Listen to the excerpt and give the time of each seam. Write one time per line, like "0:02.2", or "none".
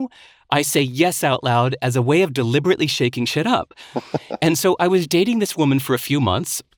none